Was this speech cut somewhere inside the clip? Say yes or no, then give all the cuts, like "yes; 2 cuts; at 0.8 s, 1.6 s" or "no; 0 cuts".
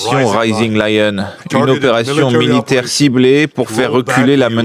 no; 0 cuts